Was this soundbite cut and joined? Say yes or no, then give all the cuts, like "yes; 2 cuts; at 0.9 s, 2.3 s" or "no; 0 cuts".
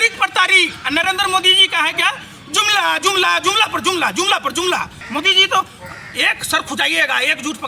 yes; 1 cut; at 5.0 s